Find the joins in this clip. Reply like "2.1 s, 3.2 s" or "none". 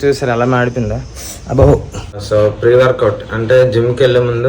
2.2 s